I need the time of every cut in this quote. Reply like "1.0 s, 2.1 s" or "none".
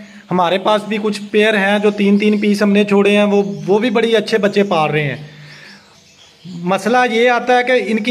none